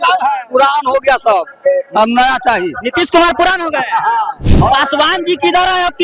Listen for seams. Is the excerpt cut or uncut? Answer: cut